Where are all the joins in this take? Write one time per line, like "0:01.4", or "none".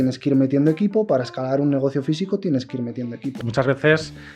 0:03.4